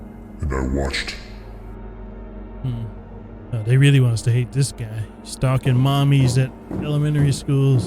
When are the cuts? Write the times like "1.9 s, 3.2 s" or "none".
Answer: 3.5 s